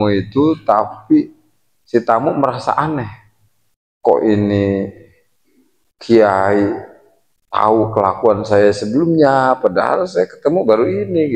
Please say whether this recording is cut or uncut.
uncut